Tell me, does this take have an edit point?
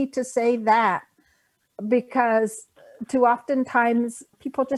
no; 0 cuts

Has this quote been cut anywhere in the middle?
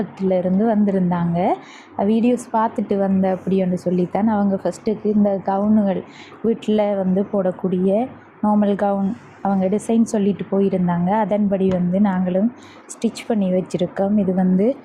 no; 0 cuts

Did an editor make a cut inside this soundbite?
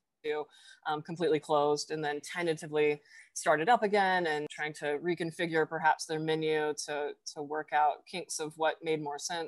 yes; 1 cut; at 4.5 s

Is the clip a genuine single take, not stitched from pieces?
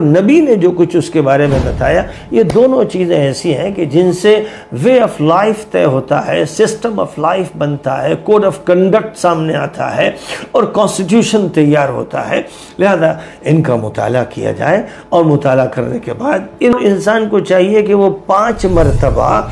no; 1 cut; at 16.7 s

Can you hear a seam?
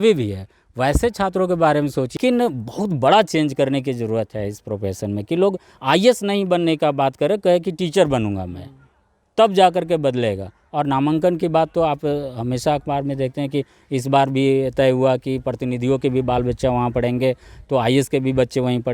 yes; 1 cut; at 2.2 s

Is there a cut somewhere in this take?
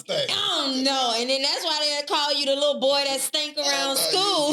no; 0 cuts

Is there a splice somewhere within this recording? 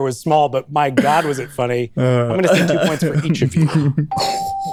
no; 0 cuts

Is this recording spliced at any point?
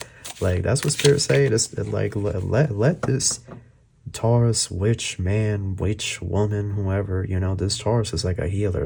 no; 0 cuts

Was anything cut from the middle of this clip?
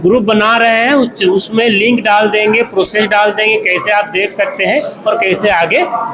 no; 0 cuts

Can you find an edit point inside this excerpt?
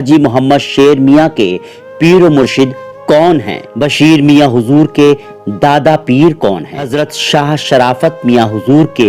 yes; 2 cuts; at 3.6 s, 6.9 s

